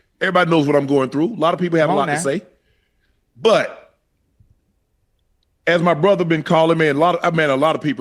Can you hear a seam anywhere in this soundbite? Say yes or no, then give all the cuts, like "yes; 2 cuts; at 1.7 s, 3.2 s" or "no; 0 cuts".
no; 0 cuts